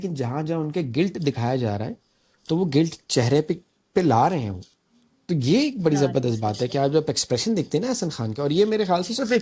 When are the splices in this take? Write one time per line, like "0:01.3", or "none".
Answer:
none